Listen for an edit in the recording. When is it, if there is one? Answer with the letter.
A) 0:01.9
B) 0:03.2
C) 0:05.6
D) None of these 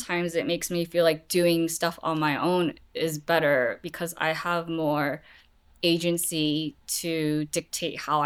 D